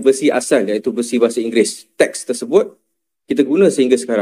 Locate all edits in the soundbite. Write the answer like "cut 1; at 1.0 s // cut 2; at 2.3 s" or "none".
cut 1; at 1.8 s